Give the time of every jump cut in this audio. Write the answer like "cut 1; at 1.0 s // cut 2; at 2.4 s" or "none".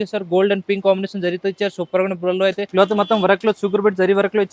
cut 1; at 2.6 s